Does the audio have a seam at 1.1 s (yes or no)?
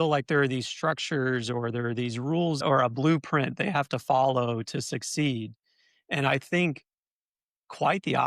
no